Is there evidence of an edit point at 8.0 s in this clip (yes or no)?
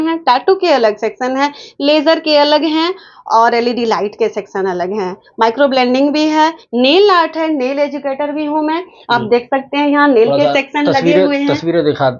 no